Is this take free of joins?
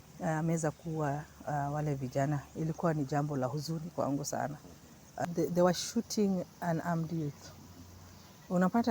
no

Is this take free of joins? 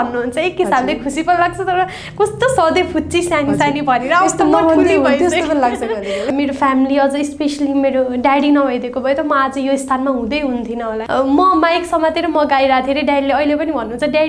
no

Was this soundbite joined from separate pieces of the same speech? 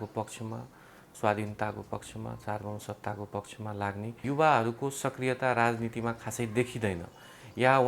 yes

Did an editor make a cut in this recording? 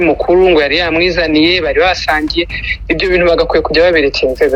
no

